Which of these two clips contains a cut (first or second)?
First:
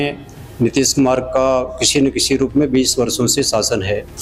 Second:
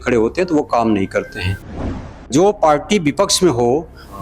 second